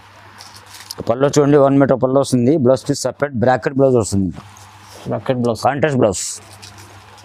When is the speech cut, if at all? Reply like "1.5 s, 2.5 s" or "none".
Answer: none